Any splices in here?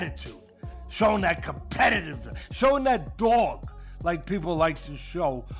no; 0 cuts

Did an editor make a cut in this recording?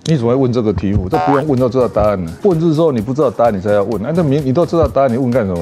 yes; 1 cut; at 2.3 s

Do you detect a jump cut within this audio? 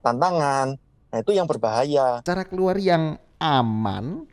yes; 1 cut; at 2.2 s

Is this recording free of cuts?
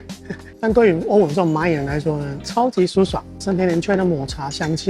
no; 1 cut; at 3.3 s

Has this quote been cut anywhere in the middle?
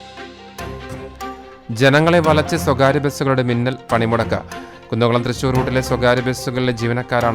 yes; 1 cut; at 0.9 s

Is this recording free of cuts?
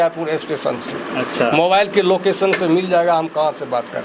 yes; 0 cuts

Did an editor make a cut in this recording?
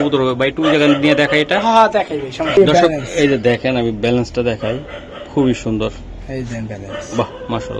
no; 0 cuts

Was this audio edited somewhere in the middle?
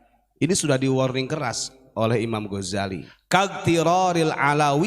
yes; 1 cut; at 3.1 s

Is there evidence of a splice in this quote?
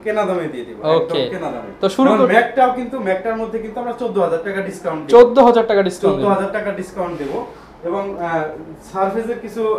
no; 0 cuts

